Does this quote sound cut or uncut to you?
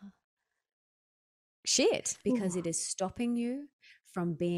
cut